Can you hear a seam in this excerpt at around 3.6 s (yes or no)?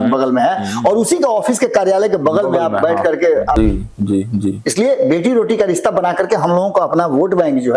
yes